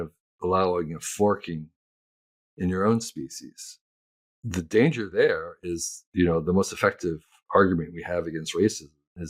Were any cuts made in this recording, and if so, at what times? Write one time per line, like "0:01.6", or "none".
none